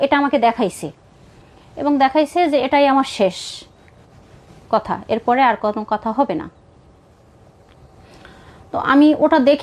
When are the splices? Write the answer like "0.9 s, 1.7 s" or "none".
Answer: none